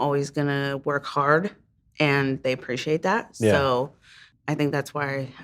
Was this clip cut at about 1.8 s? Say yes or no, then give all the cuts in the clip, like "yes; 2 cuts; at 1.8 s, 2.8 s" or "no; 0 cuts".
no; 1 cut; at 4.3 s